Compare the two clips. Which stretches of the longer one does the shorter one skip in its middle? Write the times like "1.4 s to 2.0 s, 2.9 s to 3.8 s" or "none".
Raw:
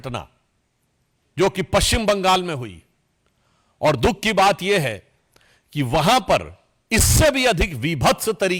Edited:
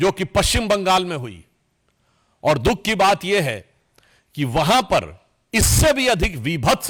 none

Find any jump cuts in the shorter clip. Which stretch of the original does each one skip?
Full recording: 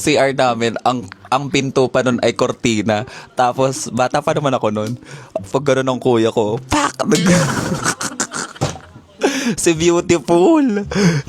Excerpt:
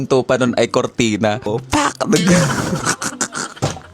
3.2 s to 6.6 s

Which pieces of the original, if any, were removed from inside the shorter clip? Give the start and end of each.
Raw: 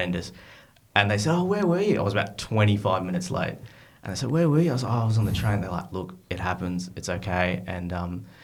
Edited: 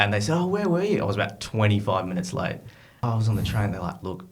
4.0 s to 4.9 s

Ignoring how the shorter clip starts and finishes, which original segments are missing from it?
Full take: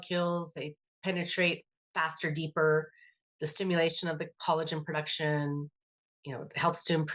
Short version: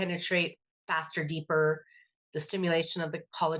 none

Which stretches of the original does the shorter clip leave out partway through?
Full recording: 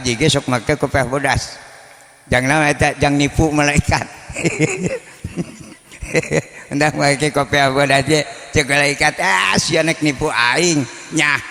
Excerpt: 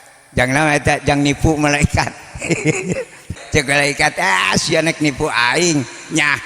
5.3 s to 8.4 s

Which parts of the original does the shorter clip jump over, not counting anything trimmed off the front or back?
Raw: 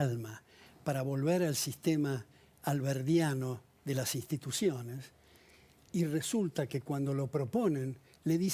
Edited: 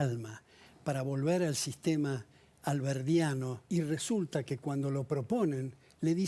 3.6 s to 5.8 s

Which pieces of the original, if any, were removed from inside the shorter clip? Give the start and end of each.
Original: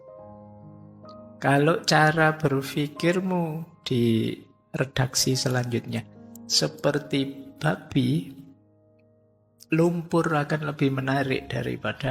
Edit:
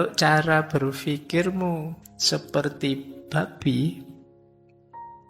3.7 s to 6.3 s

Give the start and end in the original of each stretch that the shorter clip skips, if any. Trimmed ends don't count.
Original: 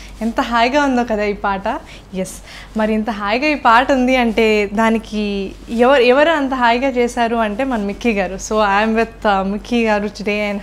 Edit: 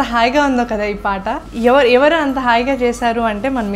1.8 s to 5.6 s

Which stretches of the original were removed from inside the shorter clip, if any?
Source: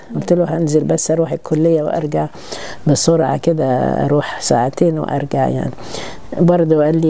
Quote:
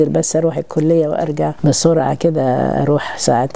2.3 s to 2.8 s

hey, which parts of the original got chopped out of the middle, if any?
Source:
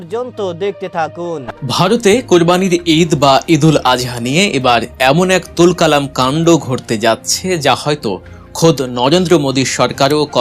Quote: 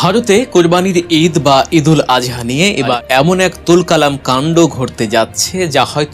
4.7 s to 4.9 s

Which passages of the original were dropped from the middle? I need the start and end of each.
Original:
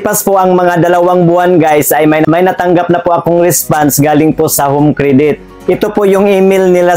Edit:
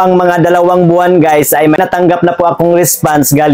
2.2 s to 2.4 s

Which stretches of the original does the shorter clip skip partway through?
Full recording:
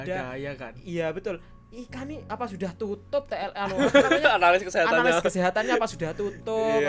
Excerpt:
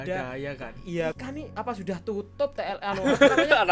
1.2 s to 1.9 s

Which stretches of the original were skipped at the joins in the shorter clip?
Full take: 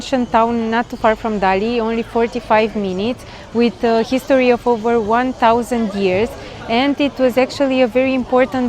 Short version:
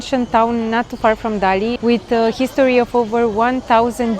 1.7 s to 3.5 s

